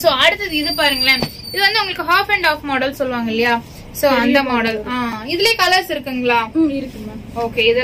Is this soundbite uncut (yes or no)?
yes